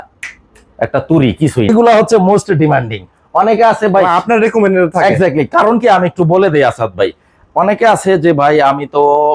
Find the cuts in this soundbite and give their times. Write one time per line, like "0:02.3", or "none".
0:01.7